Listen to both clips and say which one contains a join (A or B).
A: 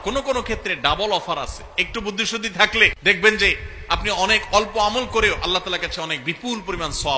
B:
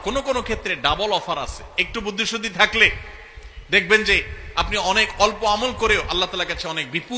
A